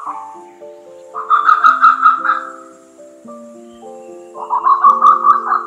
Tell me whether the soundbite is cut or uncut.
uncut